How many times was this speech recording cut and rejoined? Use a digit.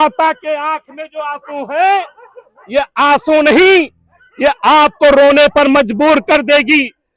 0